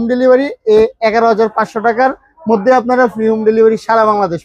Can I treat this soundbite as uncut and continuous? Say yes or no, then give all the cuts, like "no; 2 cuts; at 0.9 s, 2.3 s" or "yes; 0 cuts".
yes; 0 cuts